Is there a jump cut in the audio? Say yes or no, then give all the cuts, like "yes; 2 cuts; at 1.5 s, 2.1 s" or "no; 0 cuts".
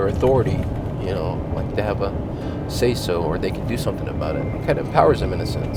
no; 0 cuts